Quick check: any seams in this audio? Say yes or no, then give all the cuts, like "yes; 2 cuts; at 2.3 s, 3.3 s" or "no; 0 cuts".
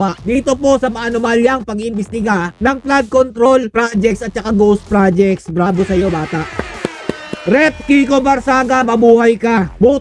no; 0 cuts